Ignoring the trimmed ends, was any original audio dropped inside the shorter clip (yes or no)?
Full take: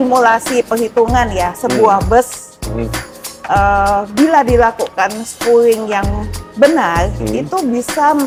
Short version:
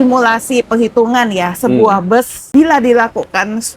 yes